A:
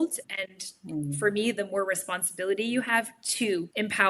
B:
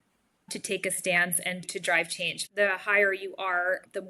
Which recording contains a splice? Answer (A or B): B